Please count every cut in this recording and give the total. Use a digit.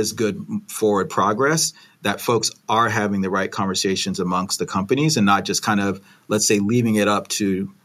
0